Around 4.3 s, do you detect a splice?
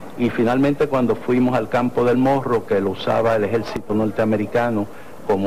no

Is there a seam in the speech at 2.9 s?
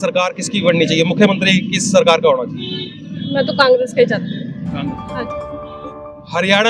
no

